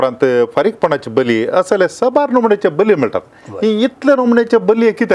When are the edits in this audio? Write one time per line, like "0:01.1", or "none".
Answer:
none